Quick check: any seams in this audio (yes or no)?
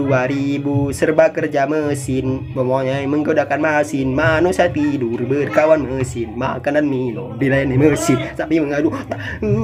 no